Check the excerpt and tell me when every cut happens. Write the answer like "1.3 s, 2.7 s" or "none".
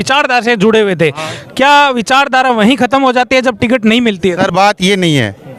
none